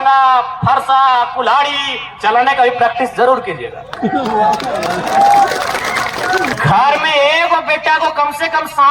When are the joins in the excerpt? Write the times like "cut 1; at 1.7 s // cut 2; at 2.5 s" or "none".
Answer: cut 1; at 6.5 s